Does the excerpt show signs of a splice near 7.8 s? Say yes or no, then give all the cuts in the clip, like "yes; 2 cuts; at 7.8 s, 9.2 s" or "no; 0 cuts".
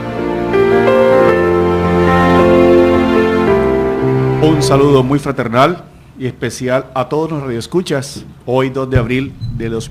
no; 0 cuts